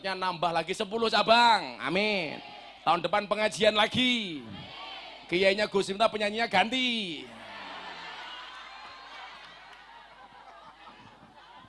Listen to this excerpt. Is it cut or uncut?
uncut